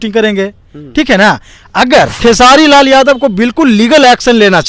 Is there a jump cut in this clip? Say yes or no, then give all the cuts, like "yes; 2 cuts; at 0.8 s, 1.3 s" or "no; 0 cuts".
yes; 1 cut; at 2.1 s